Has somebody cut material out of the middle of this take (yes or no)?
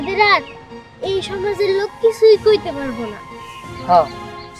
no